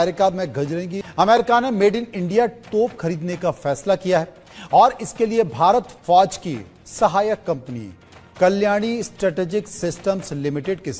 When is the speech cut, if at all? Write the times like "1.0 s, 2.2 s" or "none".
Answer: 1.0 s